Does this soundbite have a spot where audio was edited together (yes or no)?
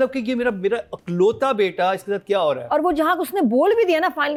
no